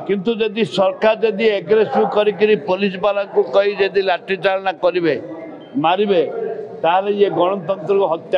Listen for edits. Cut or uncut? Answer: uncut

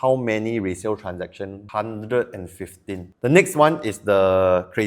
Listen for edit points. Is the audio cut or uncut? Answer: cut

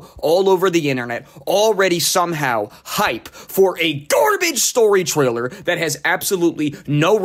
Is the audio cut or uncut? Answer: uncut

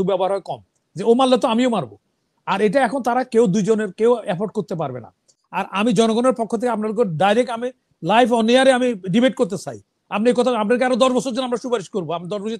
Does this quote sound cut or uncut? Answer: cut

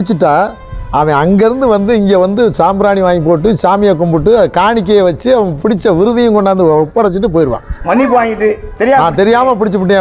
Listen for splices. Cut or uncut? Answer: uncut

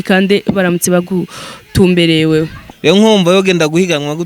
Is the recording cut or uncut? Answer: cut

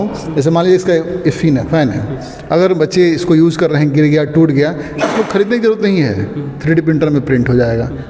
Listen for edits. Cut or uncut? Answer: uncut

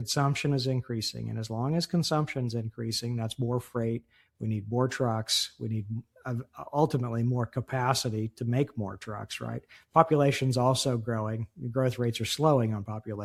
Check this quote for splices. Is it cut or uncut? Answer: uncut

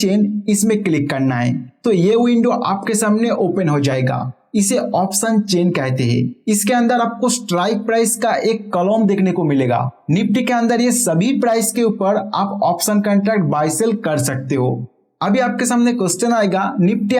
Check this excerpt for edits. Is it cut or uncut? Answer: uncut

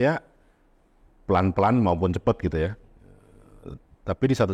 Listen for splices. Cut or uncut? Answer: uncut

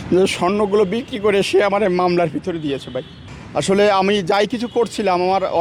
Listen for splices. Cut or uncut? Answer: uncut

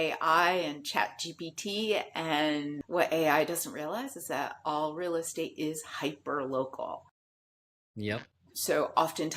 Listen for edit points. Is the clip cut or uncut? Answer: cut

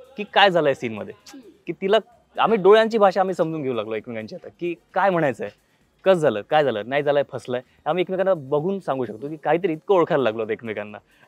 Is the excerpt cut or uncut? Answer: uncut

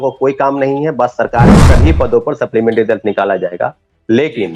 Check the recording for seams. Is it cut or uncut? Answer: cut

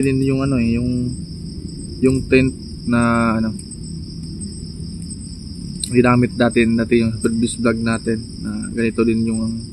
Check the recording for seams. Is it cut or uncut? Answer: uncut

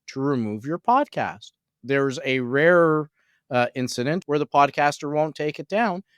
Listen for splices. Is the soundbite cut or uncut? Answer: cut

